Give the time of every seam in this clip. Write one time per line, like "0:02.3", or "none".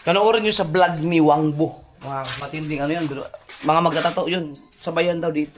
0:02.3